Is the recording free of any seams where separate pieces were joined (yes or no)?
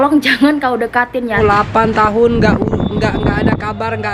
no